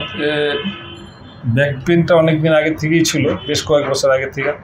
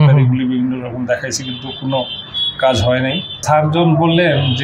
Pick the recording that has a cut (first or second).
second